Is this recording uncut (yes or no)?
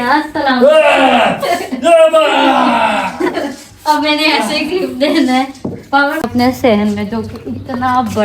no